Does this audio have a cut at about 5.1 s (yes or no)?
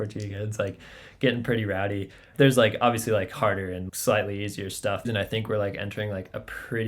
yes